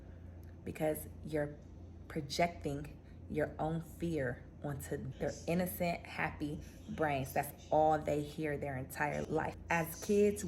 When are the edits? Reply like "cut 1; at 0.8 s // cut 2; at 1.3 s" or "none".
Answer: cut 1; at 5.1 s // cut 2; at 9.6 s